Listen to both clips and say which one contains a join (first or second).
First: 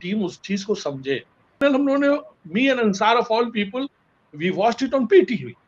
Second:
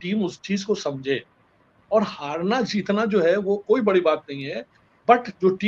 first